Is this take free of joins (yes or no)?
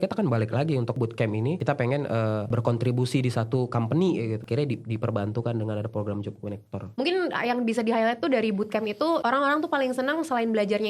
no